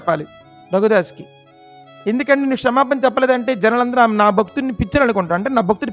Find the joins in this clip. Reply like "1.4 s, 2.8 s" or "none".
none